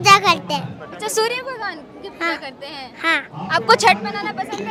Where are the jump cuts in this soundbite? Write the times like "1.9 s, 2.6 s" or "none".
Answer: none

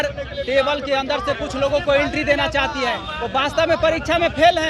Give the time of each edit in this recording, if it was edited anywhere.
none

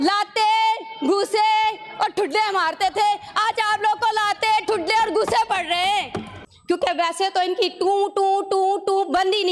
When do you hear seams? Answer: 6.4 s

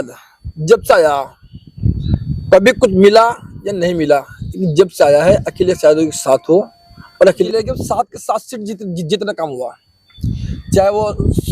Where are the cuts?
7.5 s

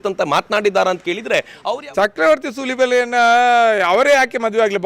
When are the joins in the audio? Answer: 1.5 s

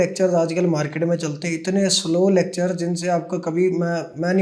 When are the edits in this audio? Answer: none

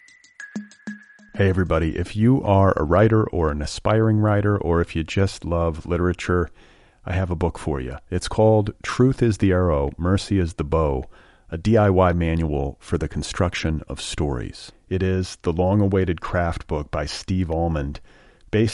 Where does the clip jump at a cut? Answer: 0.9 s

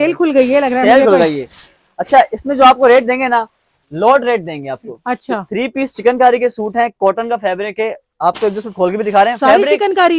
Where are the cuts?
none

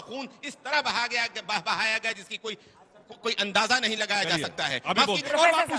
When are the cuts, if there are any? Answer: none

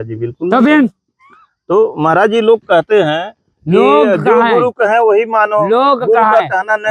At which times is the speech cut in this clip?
none

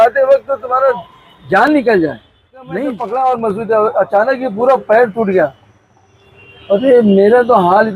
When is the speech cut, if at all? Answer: 2.8 s

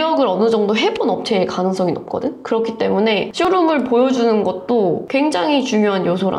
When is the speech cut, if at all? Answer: 5.1 s

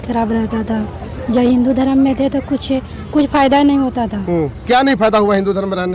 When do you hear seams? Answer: none

